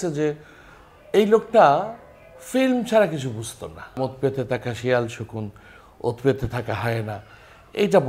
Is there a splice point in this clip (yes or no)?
yes